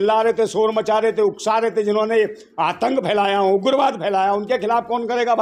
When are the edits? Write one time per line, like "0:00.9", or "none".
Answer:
none